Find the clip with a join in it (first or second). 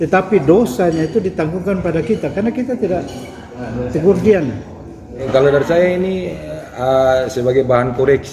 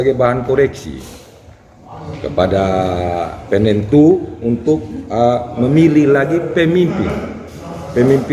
first